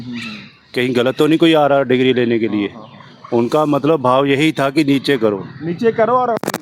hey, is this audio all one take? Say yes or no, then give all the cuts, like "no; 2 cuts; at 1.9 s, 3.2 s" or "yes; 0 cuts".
yes; 0 cuts